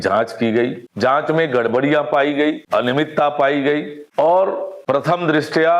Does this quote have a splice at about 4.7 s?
yes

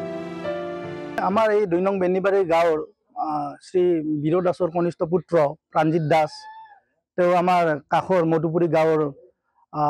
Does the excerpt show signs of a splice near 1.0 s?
yes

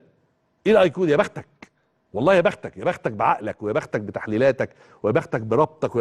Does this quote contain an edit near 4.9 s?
no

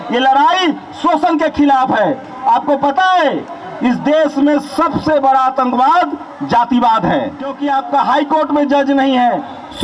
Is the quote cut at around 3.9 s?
no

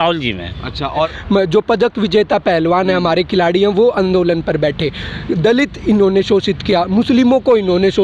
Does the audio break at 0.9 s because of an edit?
yes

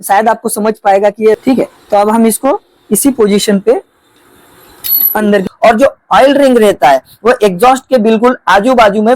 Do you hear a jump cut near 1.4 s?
yes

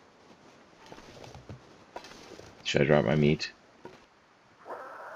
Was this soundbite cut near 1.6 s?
no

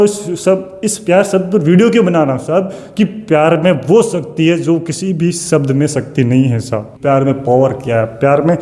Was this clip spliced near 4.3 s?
no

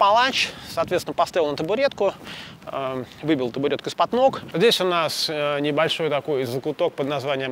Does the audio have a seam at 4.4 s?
yes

